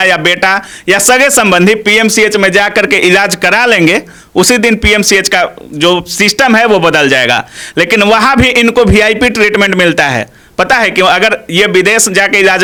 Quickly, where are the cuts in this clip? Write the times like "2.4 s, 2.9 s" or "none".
none